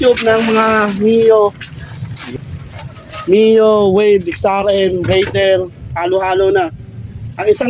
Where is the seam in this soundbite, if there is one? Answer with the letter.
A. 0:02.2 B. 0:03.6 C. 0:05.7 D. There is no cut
A